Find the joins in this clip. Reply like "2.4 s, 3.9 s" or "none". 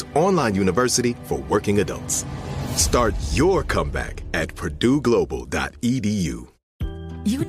6.5 s

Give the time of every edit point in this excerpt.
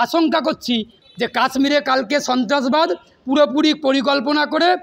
1.0 s

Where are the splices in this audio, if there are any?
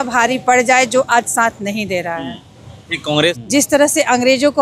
3.4 s

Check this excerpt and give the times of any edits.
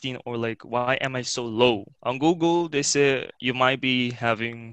1.9 s, 3.3 s

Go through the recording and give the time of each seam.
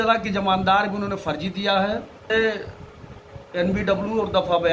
2.3 s

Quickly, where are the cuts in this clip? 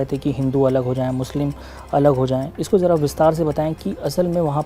none

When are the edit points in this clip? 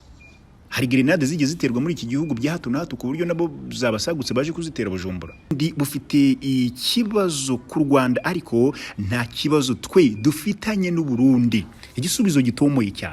5.6 s

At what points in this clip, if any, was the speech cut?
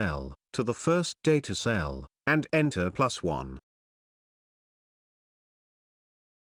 none

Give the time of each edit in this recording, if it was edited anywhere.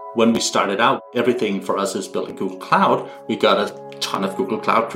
1.0 s

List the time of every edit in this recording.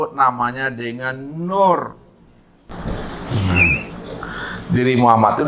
2.7 s

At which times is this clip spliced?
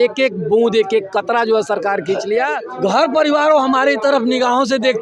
2.6 s

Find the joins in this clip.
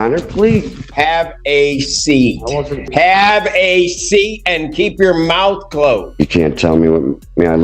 0.9 s, 2.9 s, 6.1 s

